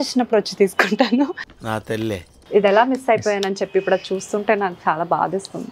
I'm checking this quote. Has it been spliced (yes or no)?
yes